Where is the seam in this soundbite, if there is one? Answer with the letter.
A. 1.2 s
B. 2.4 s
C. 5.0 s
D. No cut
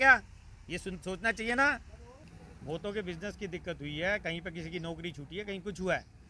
B